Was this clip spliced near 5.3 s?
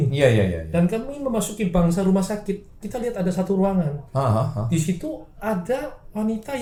no; 0 cuts

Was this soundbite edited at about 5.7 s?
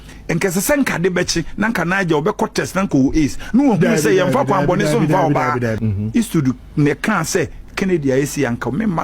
yes; 1 cut; at 5.7 s

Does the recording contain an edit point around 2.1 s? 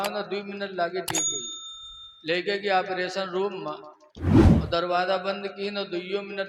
no; 2 cuts; at 4.1 s, 4.7 s

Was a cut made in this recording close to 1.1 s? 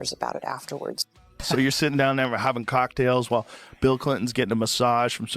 yes; 1 cut; at 1.1 s

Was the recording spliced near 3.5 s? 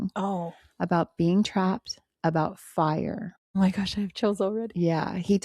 yes; 1 cut; at 3.5 s

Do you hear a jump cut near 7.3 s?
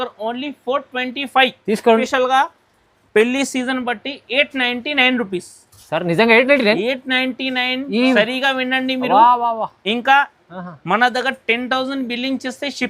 no; 1 cut; at 2.0 s

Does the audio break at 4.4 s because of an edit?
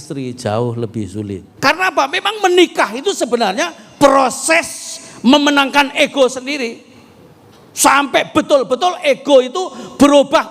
no; 1 cut; at 1.4 s

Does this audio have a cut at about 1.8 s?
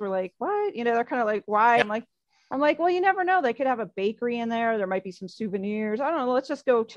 yes; 1 cut; at 1.8 s

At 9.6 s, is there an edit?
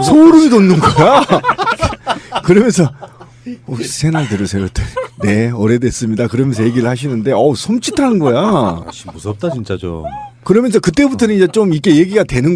no; 1 cut; at 7.6 s

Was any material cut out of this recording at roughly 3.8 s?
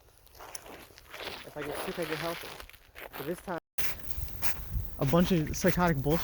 yes; 1 cut; at 3.8 s

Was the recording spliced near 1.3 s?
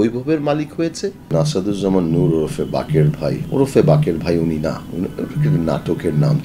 yes; 2 cuts; at 1.3 s, 3.4 s

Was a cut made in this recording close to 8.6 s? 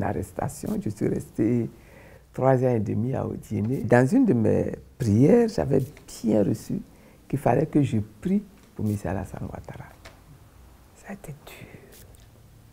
no; 1 cut; at 3.9 s

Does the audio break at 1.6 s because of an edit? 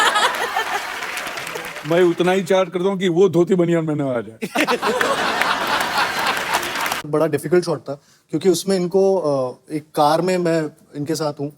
no; 1 cut; at 7.0 s

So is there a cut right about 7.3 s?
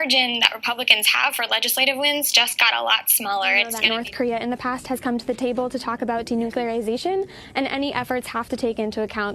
no; 1 cut; at 3.8 s

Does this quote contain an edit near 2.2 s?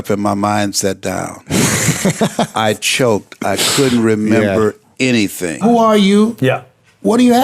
no; 1 cut; at 5.6 s

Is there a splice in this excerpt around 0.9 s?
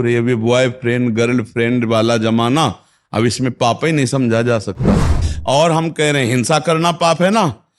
no; 1 cut; at 5.3 s

